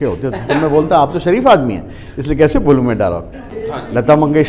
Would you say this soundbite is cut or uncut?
cut